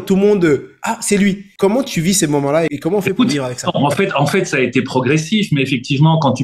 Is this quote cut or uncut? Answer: cut